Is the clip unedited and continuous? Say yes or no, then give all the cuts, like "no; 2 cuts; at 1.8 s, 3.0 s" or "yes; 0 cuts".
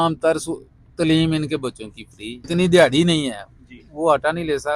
no; 1 cut; at 2.5 s